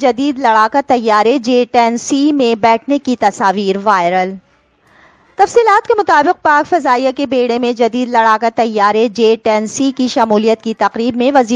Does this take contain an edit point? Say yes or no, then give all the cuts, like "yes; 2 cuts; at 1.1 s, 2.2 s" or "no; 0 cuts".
no; 0 cuts